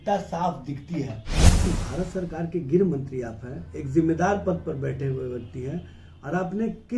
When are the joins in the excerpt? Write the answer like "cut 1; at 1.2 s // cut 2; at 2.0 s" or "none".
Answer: cut 1; at 1.7 s